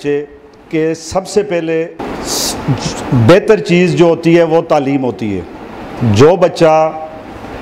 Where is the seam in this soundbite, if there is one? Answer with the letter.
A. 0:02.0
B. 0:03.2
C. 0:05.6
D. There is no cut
A